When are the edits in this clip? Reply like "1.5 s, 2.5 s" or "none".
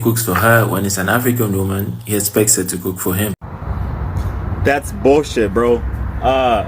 3.5 s